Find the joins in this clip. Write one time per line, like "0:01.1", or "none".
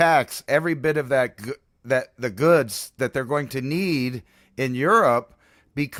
none